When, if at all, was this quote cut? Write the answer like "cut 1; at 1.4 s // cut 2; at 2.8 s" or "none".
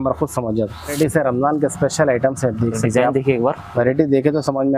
cut 1; at 1.0 s